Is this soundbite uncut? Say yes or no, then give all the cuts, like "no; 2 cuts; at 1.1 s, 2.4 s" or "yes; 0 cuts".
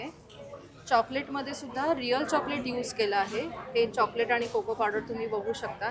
yes; 0 cuts